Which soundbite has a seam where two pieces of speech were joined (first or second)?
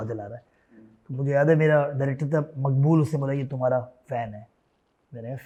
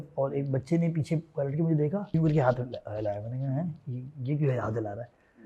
second